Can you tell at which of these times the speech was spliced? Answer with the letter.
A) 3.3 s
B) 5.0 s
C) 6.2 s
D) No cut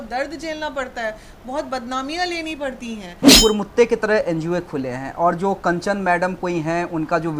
A